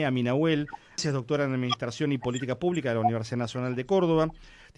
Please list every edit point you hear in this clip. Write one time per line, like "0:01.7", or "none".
0:01.0